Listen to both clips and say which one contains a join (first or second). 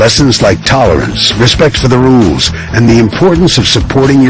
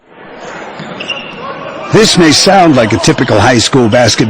second